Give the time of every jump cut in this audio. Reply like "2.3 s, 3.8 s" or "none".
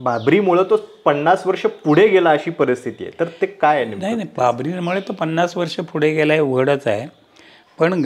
none